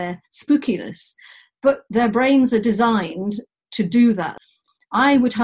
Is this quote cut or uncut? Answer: cut